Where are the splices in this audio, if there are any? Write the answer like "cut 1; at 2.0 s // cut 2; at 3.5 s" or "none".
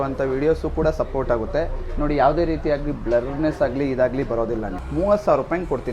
cut 1; at 4.8 s